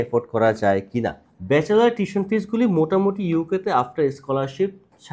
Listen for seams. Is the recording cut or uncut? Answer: uncut